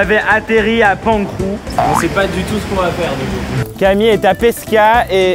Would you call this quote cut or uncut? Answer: uncut